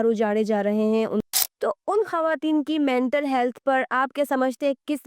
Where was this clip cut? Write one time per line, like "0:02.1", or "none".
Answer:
0:01.2